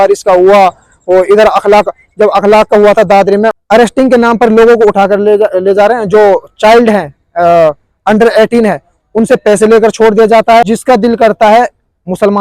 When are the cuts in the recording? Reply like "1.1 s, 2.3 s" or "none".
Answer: 3.5 s, 10.7 s

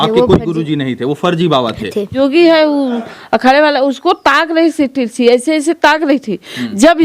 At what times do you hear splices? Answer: 2.1 s

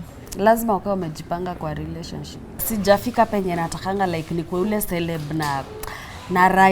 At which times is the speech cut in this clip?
2.7 s

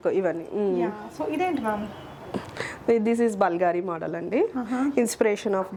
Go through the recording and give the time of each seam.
none

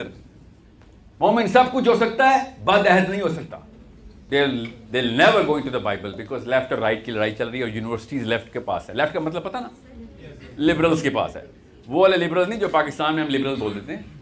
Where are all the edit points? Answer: 4.2 s

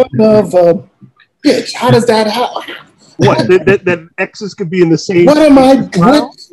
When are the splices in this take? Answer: none

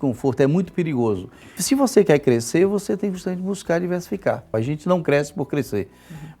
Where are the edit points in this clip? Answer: 1.6 s, 4.5 s

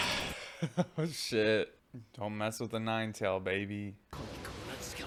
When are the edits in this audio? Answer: none

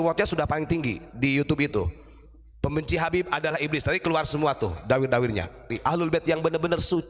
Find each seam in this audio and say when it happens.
5.8 s

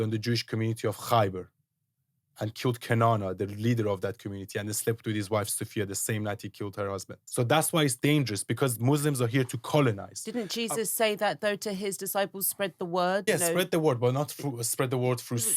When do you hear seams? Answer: 7.2 s, 13.2 s

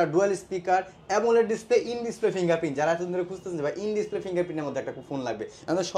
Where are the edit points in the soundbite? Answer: none

